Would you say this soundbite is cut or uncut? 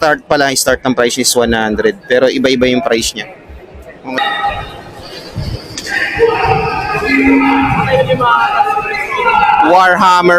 cut